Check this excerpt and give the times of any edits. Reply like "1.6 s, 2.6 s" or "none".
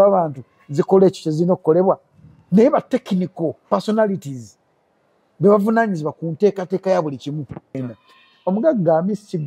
7.8 s